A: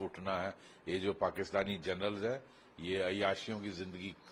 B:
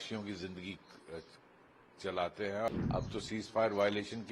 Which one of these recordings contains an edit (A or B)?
B